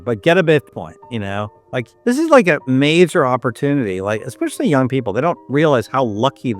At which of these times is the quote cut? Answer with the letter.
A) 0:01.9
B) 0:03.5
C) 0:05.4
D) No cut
A